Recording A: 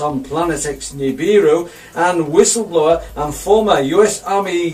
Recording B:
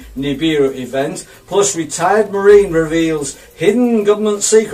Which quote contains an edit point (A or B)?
B